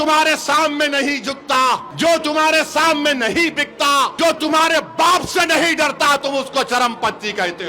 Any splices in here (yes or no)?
yes